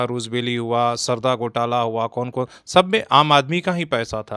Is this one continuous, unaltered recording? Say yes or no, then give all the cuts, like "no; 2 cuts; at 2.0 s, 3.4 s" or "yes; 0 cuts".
yes; 0 cuts